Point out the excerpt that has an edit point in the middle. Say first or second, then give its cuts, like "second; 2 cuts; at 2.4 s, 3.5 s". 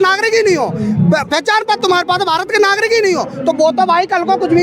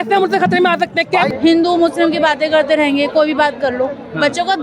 second; 1 cut; at 1.3 s